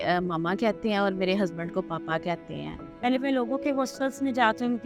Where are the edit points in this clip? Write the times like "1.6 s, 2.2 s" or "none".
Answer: 2.8 s